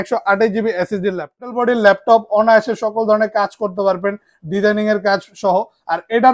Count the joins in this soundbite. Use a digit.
1